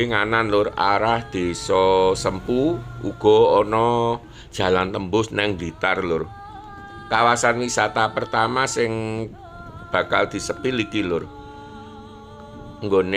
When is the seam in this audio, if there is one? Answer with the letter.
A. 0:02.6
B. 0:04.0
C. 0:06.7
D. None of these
D